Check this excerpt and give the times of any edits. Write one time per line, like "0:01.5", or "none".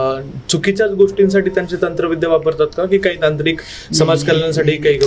none